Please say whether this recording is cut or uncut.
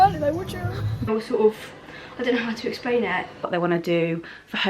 cut